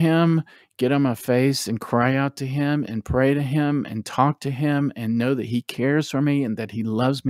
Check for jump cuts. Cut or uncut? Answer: uncut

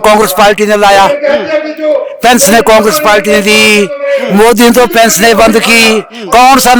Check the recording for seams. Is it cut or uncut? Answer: uncut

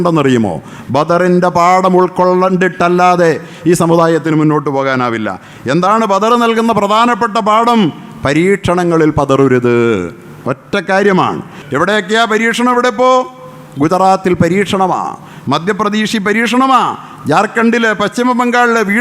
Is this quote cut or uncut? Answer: cut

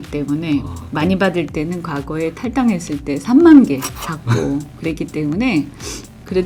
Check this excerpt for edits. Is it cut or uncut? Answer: uncut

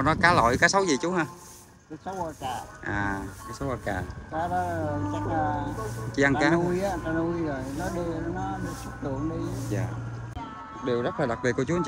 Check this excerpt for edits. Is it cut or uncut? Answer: cut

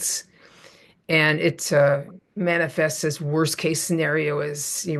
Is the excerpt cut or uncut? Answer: uncut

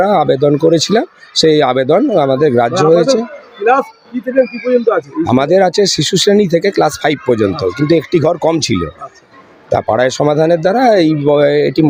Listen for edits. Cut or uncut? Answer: uncut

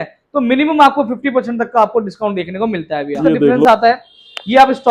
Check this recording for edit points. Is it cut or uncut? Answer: cut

